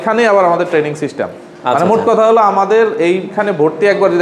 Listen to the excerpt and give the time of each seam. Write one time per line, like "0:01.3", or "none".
none